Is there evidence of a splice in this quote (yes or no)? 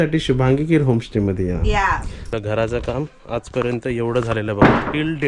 yes